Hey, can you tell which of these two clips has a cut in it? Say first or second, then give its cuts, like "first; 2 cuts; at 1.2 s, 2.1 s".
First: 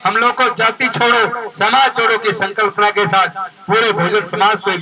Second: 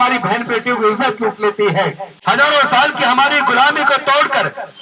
second; 1 cut; at 2.1 s